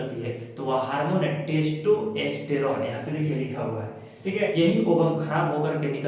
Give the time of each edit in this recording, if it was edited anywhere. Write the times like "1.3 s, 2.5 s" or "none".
4.6 s